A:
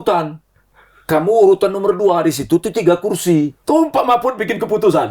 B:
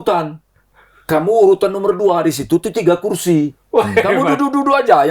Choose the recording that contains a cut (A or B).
A